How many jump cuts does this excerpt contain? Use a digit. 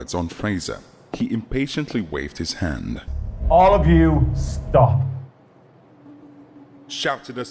1